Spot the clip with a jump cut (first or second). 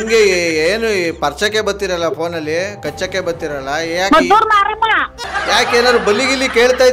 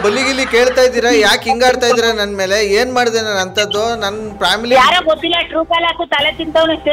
first